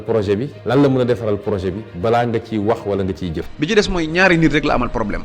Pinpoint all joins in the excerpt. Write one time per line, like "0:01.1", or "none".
0:03.4